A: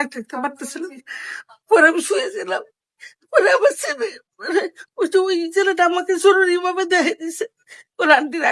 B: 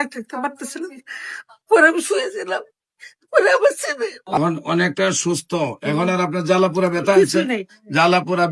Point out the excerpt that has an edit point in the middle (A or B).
B